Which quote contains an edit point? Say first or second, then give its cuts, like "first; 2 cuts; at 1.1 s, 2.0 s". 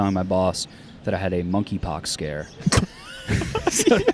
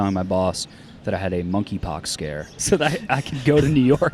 second; 1 cut; at 2.6 s